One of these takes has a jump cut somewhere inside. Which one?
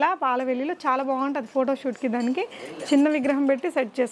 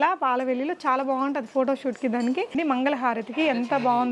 second; 1 cut; at 2.5 s

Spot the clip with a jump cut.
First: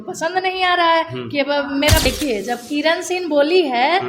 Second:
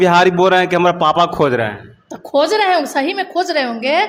first; 1 cut; at 2.1 s

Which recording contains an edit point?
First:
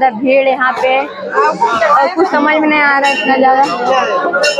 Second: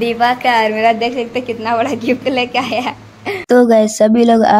second; 1 cut; at 3.4 s

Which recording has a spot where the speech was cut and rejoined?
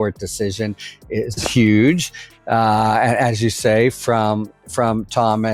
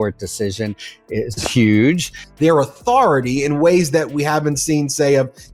first; 1 cut; at 2.3 s

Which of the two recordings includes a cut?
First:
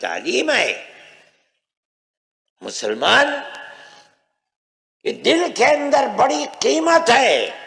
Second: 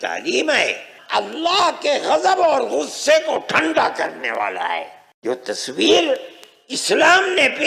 second; 2 cuts; at 0.9 s, 5.0 s

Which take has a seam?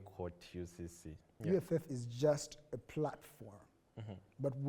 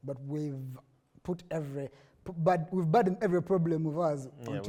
first; 1 cut; at 1.3 s

